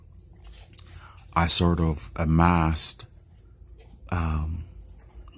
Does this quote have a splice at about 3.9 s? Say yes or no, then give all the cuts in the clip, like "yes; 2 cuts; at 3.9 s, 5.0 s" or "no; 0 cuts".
no; 1 cut; at 1.7 s